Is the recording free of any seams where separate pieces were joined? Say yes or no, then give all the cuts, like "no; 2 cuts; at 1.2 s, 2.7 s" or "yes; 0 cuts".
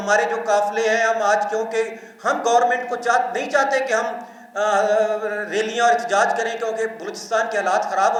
yes; 0 cuts